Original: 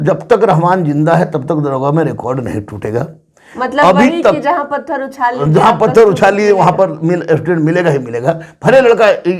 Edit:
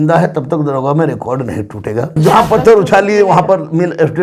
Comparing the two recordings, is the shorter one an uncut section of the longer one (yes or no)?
no